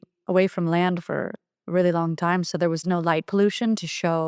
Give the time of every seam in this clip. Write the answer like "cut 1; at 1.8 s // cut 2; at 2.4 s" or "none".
cut 1; at 2.8 s